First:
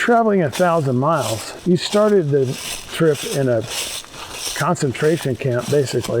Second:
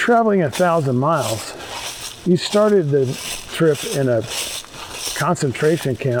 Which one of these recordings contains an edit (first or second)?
first